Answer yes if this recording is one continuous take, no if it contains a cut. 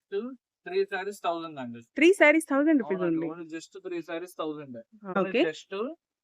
no